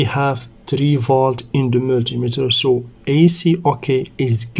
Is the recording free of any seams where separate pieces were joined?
yes; 0 cuts

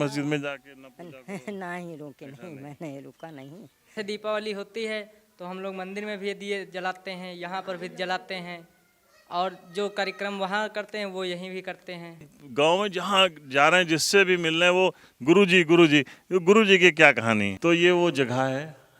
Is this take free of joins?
no; 3 cuts; at 3.9 s, 12.3 s, 17.5 s

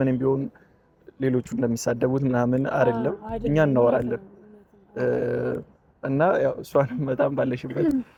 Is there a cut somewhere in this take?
no; 0 cuts

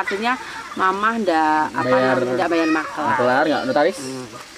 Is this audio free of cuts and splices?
yes; 0 cuts

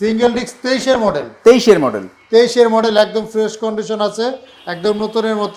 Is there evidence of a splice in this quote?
no; 0 cuts

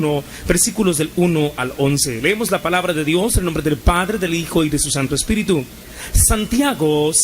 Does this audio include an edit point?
yes; 1 cut; at 1.1 s

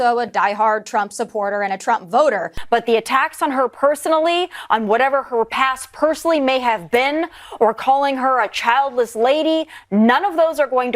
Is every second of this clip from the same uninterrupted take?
no; 1 cut; at 2.6 s

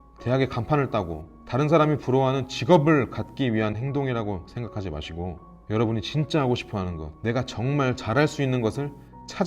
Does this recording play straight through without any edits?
yes; 0 cuts

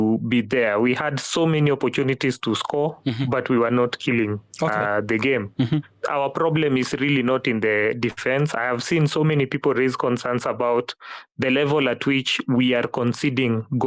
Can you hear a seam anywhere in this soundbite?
no; 0 cuts

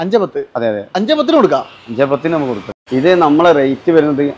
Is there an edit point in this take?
yes; 1 cut; at 2.7 s

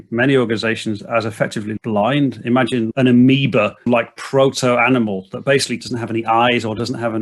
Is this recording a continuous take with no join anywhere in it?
no; 3 cuts; at 2.9 s, 3.9 s, 5.8 s

